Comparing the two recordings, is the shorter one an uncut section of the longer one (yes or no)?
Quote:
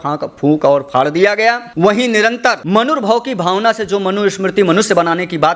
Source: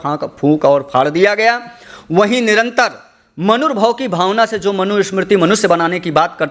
no